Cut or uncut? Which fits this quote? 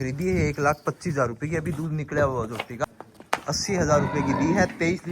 cut